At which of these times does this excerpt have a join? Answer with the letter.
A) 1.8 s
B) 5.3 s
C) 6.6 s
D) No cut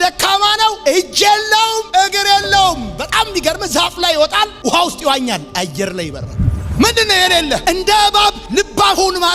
C